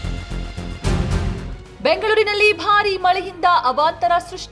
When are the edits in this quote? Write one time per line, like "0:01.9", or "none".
0:01.8